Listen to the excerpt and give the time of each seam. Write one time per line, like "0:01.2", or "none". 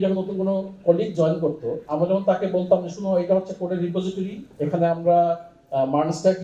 none